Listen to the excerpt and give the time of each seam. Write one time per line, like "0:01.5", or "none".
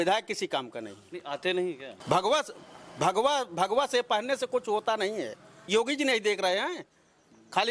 0:01.9
0:05.5